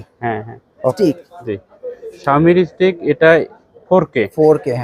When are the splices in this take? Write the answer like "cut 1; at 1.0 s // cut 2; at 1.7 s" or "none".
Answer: cut 1; at 0.9 s